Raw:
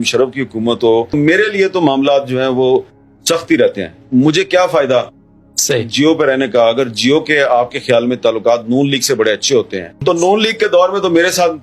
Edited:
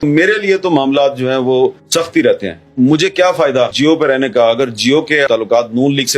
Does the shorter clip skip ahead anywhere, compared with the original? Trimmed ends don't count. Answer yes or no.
yes